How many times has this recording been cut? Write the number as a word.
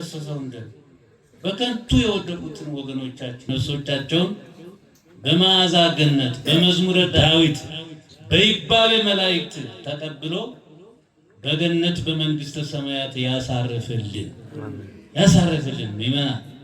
two